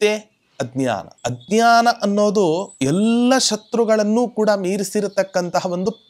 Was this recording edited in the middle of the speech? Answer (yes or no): yes